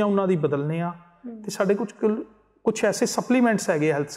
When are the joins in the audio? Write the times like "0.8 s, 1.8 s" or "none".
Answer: none